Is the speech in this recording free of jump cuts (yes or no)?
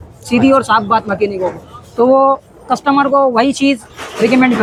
yes